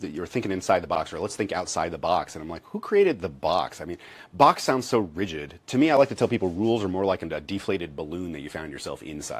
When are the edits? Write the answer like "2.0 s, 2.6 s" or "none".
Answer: none